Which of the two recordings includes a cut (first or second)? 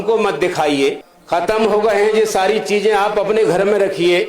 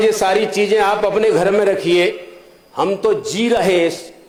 first